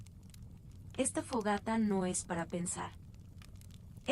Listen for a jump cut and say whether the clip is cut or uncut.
cut